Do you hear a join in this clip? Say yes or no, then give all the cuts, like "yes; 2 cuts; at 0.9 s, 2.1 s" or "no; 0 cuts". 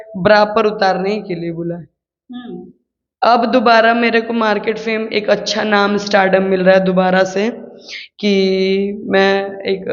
no; 0 cuts